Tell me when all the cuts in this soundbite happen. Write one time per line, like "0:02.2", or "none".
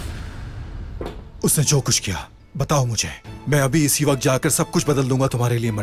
0:01.3